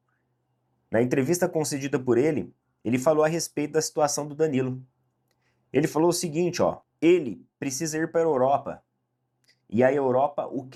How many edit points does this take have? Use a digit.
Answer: 0